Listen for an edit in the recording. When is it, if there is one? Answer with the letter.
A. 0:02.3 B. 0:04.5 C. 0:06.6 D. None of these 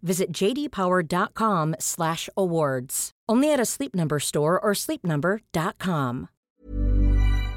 C